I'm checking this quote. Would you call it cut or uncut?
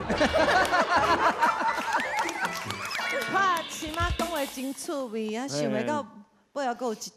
uncut